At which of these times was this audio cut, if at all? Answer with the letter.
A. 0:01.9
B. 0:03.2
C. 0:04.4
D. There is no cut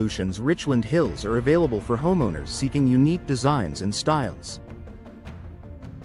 D